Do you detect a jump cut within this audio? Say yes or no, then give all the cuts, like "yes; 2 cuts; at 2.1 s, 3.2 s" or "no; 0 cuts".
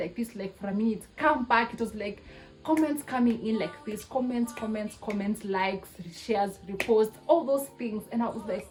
no; 0 cuts